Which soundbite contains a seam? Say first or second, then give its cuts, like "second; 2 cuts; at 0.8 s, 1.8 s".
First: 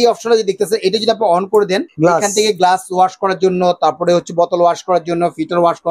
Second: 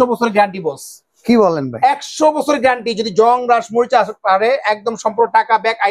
first; 1 cut; at 1.9 s